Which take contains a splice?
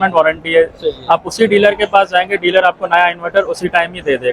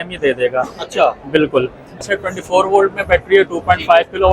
second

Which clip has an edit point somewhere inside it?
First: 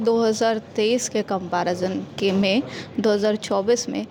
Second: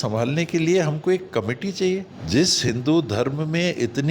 second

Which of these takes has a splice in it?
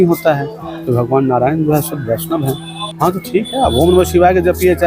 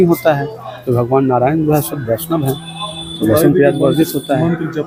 first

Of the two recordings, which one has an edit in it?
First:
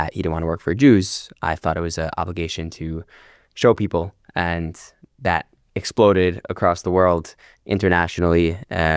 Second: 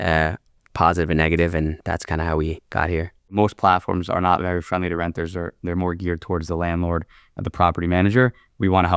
second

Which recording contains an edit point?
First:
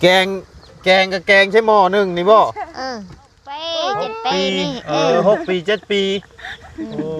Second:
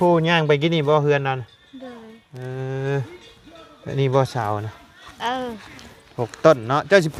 first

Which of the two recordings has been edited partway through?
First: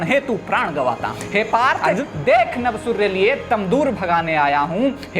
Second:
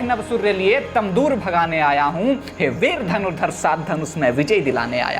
first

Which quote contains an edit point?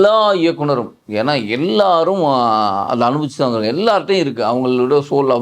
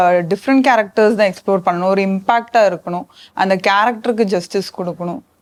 first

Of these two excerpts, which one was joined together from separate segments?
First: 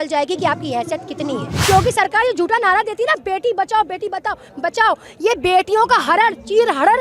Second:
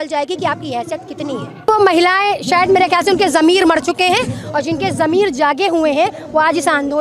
first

